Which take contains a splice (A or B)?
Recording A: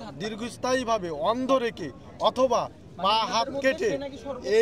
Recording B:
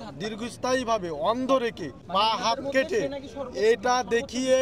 B